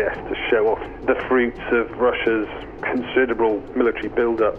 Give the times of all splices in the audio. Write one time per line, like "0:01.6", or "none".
0:00.9
0:03.6